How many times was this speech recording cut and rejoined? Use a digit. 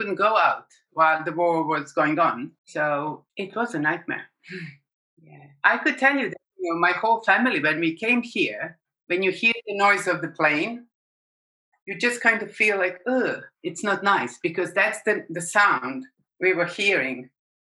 3